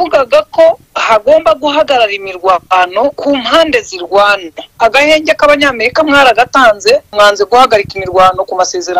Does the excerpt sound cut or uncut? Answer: cut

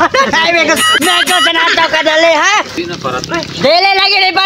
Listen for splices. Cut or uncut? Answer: cut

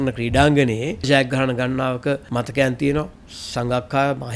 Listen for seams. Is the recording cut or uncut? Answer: cut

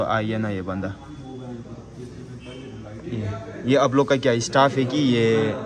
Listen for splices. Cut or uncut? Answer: uncut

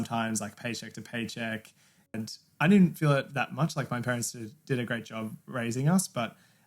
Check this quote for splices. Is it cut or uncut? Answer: uncut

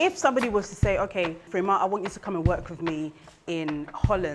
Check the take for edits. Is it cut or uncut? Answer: cut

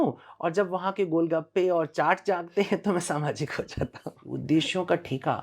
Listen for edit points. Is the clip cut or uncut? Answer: cut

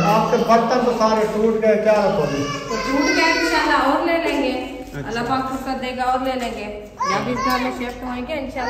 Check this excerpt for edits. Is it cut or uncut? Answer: uncut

